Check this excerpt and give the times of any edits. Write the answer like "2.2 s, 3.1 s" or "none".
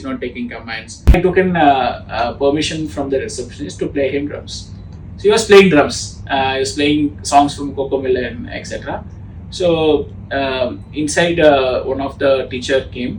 1.2 s, 6.0 s